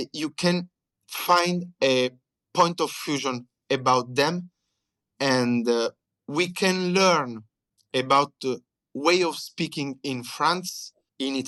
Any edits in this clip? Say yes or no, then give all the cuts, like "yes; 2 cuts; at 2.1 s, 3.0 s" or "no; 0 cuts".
no; 0 cuts